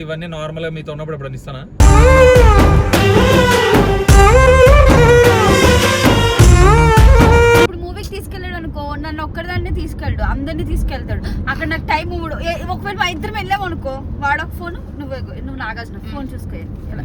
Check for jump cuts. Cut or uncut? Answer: cut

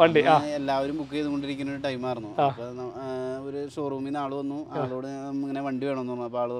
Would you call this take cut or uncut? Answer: uncut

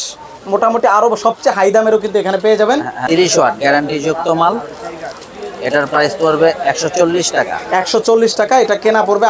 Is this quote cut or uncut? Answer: cut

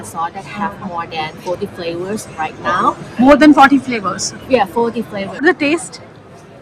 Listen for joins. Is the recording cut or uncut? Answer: cut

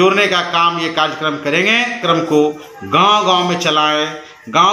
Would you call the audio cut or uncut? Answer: cut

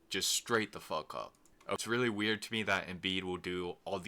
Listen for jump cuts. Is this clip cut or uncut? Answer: cut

